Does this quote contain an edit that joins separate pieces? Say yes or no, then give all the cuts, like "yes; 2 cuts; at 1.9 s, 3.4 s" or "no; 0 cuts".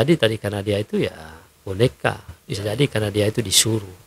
no; 0 cuts